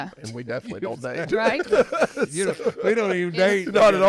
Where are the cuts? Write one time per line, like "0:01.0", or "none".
none